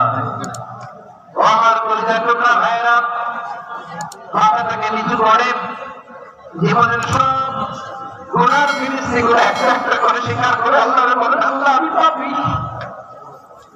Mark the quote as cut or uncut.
uncut